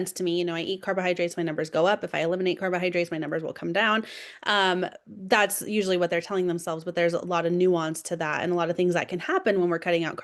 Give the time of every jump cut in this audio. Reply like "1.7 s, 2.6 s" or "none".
none